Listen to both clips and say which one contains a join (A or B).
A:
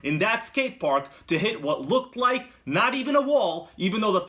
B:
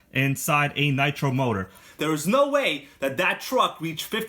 B